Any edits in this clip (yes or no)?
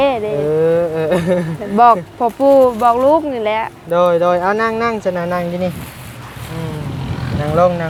no